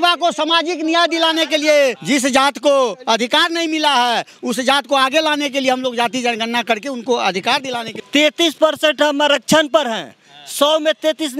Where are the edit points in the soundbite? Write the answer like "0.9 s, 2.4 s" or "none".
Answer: 2.0 s, 7.9 s

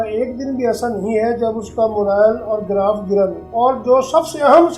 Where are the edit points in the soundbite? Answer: 3.4 s

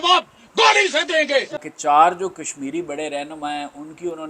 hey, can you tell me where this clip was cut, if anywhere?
1.6 s

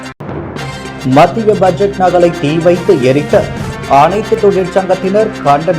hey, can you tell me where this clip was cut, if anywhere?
1.0 s

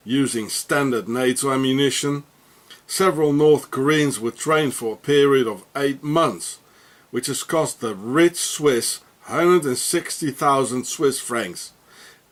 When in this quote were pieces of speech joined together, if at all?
none

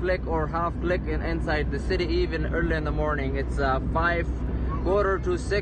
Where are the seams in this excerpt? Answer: none

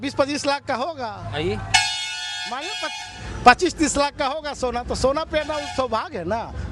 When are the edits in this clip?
none

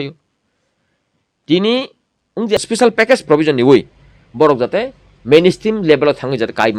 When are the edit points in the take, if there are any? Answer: 2.6 s

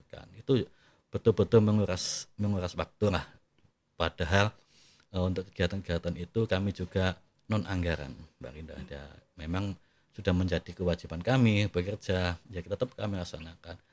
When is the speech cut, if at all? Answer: none

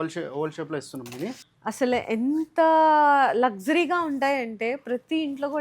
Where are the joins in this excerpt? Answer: 1.5 s

